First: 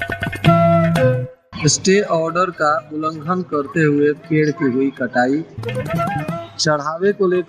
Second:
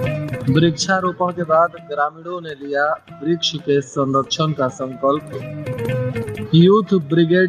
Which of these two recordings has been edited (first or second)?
first